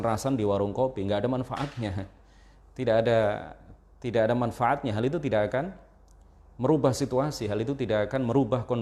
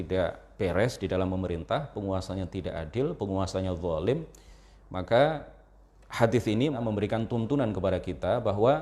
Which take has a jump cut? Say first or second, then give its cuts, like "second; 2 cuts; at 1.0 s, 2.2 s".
second; 1 cut; at 6.8 s